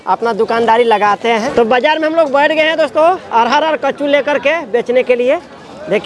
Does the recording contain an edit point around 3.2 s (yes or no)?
no